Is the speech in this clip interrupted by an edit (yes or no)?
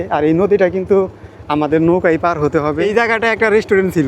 yes